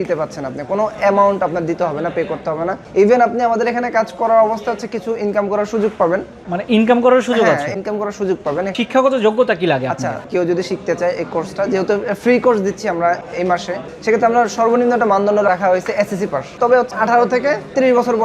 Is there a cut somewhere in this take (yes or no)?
yes